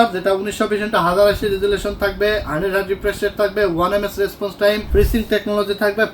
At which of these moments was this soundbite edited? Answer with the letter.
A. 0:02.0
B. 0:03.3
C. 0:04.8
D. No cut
C